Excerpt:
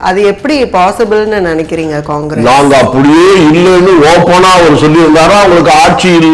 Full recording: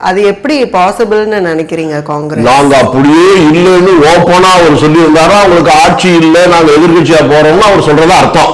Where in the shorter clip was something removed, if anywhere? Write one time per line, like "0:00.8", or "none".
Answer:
none